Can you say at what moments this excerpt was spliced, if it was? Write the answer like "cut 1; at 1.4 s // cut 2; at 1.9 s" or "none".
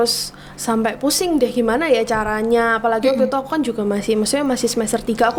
none